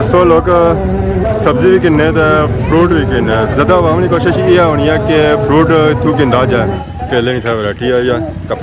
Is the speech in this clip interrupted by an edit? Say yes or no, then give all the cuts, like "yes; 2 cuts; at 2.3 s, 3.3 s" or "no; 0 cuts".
yes; 1 cut; at 6.7 s